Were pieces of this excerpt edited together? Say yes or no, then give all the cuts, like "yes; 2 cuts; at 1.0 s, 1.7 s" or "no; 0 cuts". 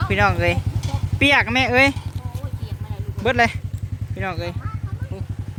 no; 0 cuts